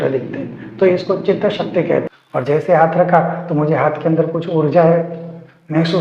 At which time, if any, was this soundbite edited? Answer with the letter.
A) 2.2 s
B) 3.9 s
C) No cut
A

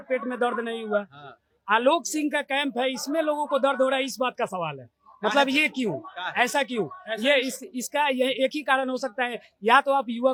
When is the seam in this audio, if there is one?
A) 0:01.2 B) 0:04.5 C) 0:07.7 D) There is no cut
D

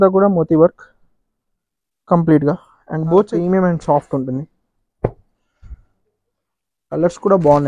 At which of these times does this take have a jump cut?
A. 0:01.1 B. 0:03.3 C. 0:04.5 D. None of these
B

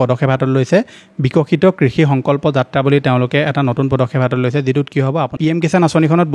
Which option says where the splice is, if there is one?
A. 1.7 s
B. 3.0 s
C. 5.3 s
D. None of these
C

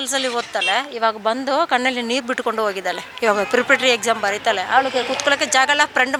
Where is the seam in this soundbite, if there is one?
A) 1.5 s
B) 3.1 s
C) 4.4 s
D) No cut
D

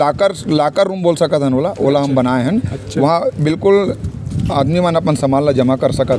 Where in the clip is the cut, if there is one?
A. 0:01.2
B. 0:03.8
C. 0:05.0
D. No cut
D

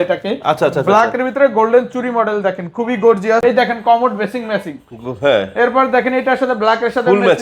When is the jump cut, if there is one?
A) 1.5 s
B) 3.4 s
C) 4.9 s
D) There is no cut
B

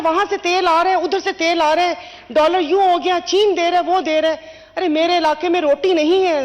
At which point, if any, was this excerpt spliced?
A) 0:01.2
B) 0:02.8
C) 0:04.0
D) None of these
D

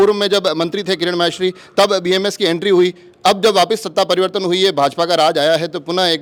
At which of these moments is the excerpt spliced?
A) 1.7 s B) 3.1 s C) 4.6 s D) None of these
D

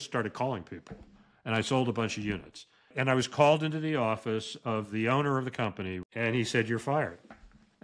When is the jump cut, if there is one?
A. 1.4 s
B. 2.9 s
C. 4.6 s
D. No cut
B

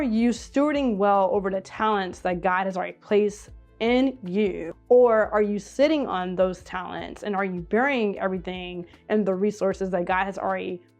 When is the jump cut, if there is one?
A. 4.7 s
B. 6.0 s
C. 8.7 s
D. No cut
A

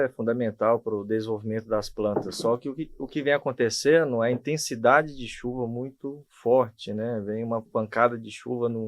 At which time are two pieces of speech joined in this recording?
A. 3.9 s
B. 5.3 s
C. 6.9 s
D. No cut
D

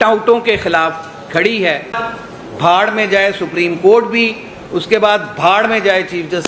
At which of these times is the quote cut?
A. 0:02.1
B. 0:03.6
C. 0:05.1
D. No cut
A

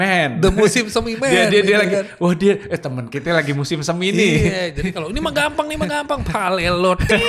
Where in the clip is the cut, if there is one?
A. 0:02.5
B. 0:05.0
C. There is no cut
C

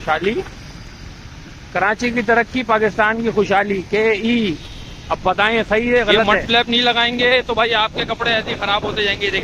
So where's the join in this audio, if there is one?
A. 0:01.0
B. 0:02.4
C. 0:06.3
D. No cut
C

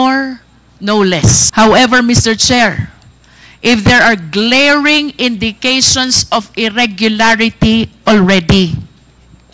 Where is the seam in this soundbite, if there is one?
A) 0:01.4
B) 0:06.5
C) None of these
A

